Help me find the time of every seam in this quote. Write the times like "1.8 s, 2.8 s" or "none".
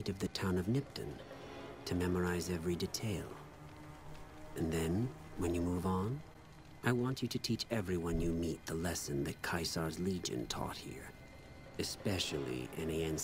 none